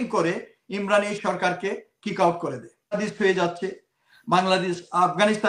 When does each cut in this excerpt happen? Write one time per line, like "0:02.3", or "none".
0:02.9